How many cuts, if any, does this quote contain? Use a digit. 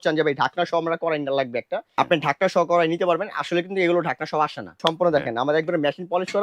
2